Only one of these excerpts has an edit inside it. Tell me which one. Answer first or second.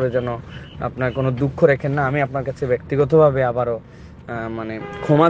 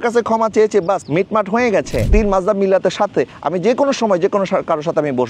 second